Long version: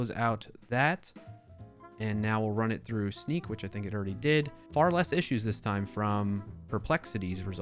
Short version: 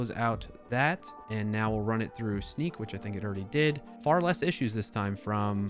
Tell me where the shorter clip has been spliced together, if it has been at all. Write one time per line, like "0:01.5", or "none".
0:01.1